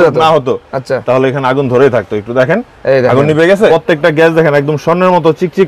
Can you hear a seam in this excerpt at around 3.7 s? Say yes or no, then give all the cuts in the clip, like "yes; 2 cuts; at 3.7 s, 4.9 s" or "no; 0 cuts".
yes; 1 cut; at 3.7 s